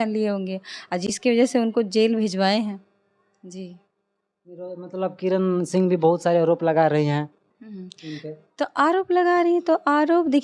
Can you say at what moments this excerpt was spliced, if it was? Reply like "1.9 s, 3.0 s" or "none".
none